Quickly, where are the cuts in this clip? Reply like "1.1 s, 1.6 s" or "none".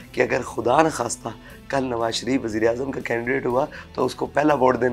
none